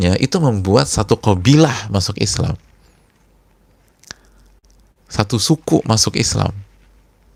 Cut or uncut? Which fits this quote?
uncut